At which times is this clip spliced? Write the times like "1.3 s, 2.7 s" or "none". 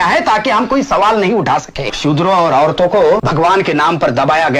1.9 s, 3.3 s